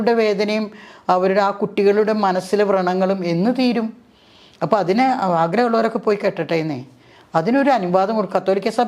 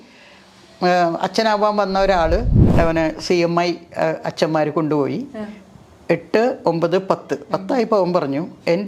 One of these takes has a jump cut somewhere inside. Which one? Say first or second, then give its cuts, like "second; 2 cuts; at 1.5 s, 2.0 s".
second; 1 cut; at 2.6 s